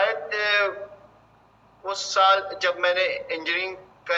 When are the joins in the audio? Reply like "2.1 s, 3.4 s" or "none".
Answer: none